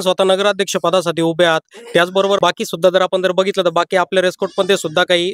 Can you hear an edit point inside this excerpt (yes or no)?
yes